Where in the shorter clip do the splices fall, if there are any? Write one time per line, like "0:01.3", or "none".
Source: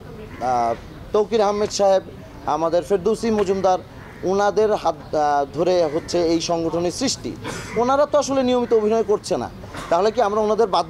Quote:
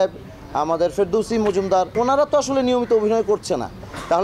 0:01.9